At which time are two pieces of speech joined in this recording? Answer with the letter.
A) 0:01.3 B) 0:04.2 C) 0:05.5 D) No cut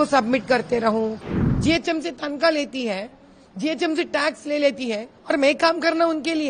A